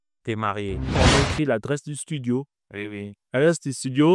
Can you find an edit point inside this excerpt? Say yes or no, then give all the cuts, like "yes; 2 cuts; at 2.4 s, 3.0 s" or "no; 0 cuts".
yes; 1 cut; at 1.0 s